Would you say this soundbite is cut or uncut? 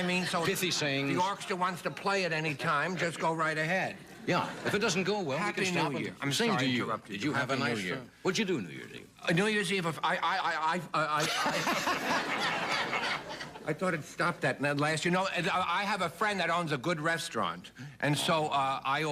cut